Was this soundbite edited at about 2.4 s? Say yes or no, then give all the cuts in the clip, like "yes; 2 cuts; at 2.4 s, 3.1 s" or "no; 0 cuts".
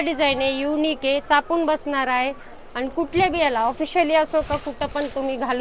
no; 0 cuts